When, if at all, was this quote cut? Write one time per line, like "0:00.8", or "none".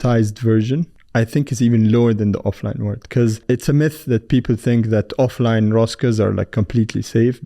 0:01.0
0:03.4